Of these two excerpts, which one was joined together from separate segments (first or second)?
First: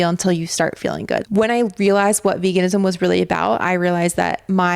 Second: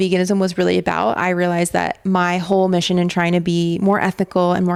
first